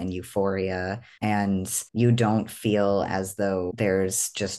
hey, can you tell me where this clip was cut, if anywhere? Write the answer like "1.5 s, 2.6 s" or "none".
1.1 s, 1.8 s, 3.7 s